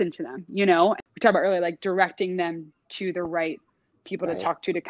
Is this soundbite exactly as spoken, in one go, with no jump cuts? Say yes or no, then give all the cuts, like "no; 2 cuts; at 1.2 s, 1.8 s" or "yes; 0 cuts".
no; 1 cut; at 1.0 s